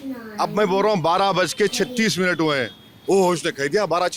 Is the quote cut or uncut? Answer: uncut